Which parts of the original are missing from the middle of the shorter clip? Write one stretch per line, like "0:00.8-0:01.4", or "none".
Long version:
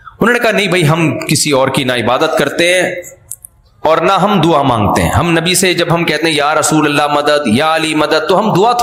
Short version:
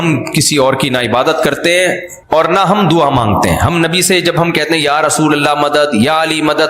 0:03.0-0:03.6